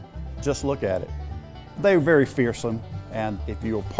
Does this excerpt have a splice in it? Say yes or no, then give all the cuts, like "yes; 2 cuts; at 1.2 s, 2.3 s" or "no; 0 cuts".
yes; 2 cuts; at 1.2 s, 3.1 s